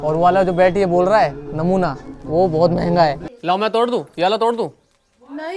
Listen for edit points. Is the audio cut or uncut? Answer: cut